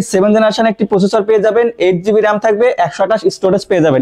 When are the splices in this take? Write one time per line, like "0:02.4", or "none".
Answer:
none